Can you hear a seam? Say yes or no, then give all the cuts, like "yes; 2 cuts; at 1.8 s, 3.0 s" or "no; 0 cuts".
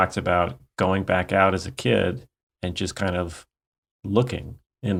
no; 0 cuts